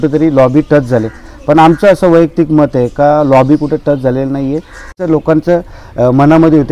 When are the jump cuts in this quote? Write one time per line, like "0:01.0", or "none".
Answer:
0:05.0